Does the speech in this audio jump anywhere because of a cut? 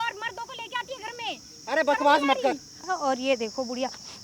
yes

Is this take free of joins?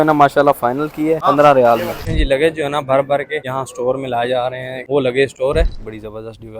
no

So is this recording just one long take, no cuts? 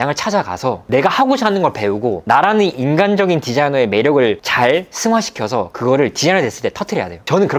yes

